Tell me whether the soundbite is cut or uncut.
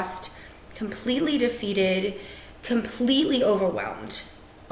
uncut